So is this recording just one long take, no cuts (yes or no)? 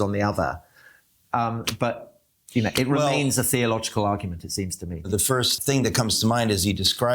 no